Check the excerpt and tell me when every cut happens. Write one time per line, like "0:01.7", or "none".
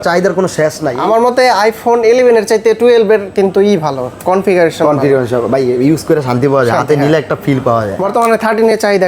0:00.9
0:07.9